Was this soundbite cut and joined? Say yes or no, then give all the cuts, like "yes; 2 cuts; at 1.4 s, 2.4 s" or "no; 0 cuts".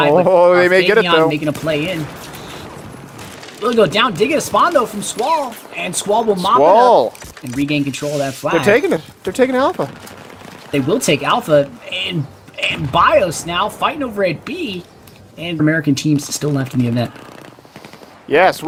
no; 0 cuts